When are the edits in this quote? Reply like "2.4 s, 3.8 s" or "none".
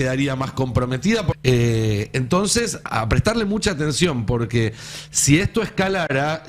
1.3 s

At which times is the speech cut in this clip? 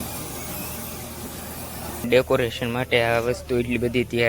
2.0 s

